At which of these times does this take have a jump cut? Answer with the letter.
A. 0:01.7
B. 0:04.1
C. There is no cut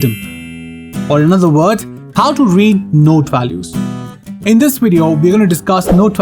C